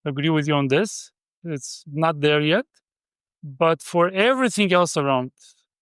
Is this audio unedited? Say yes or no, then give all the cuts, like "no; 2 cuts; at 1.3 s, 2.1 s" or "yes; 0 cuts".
no; 1 cut; at 1.3 s